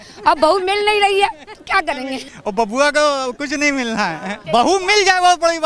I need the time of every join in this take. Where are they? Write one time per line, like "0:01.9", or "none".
0:02.2
0:04.4

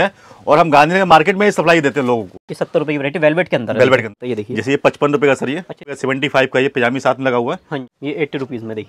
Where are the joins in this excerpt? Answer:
0:02.5
0:04.2
0:06.0
0:07.9

